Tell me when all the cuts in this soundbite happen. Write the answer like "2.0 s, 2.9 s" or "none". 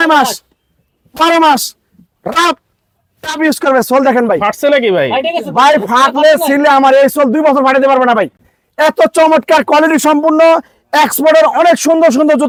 none